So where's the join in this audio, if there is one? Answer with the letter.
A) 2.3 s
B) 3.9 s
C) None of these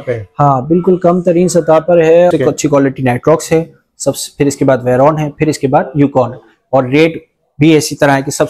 A